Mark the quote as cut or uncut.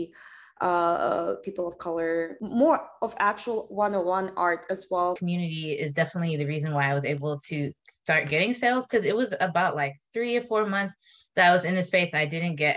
cut